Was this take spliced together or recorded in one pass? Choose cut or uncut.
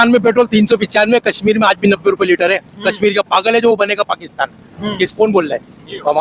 uncut